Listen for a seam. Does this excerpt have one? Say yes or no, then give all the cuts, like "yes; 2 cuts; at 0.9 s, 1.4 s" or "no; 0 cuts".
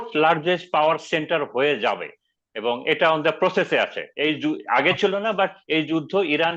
no; 0 cuts